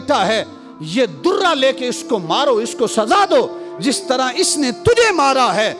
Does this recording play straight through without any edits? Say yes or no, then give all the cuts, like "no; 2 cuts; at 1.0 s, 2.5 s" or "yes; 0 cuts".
yes; 0 cuts